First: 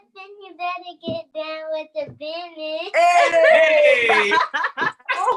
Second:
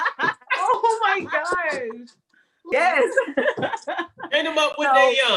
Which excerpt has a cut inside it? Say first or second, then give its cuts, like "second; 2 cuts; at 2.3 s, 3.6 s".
second; 1 cut; at 2.7 s